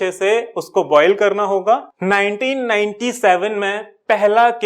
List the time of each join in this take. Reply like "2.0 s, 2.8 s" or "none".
1.9 s